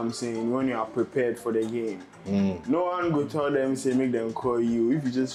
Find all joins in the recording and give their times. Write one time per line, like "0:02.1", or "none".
none